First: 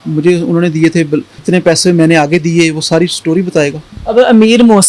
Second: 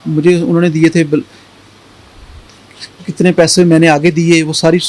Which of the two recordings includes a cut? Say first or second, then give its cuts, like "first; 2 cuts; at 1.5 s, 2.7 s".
first; 2 cuts; at 1.3 s, 3.9 s